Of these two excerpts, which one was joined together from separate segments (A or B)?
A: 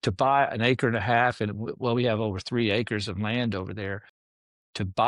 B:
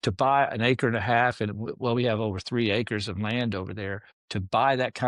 B